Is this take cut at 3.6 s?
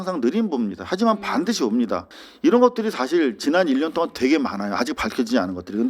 no; 1 cut; at 2.0 s

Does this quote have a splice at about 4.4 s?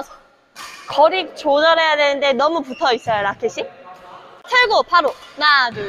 yes; 1 cut; at 4.4 s

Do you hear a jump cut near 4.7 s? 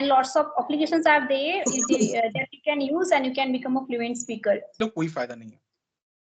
yes; 1 cut; at 4.7 s

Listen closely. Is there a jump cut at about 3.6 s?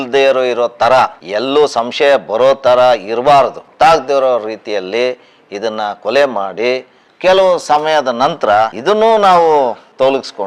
yes; 2 cuts; at 3.6 s, 7.1 s

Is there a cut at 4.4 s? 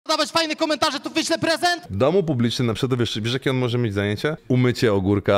yes; 2 cuts; at 1.9 s, 4.4 s

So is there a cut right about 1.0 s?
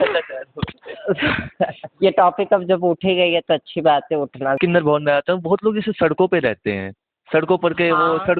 no; 1 cut; at 4.6 s

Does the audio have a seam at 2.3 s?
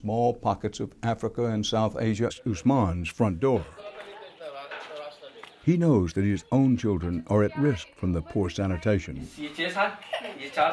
no; 0 cuts

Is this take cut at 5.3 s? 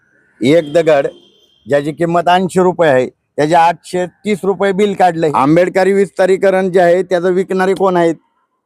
yes; 1 cut; at 5.3 s

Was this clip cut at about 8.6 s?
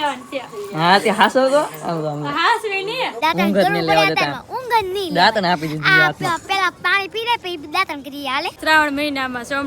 yes; 2 cuts; at 3.1 s, 8.6 s

